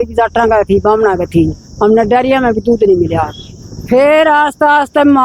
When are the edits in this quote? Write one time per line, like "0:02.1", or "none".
none